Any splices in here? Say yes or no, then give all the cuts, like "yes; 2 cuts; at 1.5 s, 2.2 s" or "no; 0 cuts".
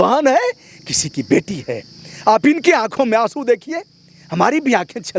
no; 0 cuts